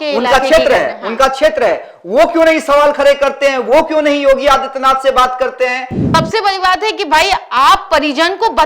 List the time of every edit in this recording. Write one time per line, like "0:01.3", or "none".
0:05.9